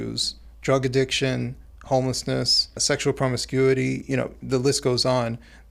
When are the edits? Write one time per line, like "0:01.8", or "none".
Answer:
0:02.8